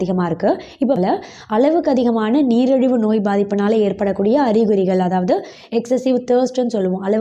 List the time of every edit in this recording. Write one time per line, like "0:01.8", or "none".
0:01.0